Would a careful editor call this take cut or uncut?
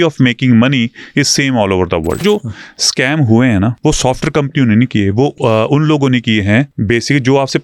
cut